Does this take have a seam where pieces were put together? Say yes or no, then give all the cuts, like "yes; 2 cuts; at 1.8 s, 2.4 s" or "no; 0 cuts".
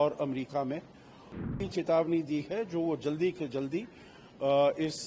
yes; 1 cut; at 1.5 s